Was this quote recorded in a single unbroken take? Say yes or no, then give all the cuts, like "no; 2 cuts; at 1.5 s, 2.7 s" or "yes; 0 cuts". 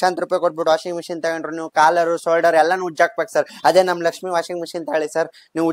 yes; 0 cuts